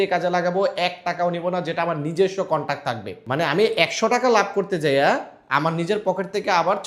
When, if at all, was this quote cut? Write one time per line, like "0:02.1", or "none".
0:03.1